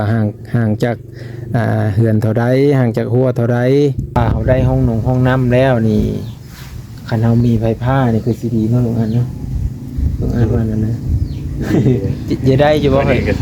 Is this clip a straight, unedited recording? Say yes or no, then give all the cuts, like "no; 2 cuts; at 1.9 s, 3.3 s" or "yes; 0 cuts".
no; 1 cut; at 4.2 s